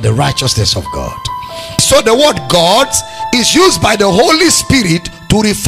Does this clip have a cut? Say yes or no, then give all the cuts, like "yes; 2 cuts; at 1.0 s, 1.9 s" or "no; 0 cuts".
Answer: no; 0 cuts